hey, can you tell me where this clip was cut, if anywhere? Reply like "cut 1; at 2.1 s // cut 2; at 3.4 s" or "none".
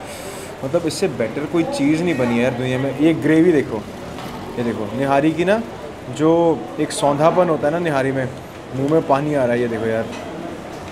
none